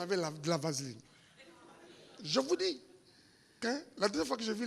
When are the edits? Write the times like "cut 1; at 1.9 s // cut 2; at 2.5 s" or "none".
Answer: cut 1; at 3.6 s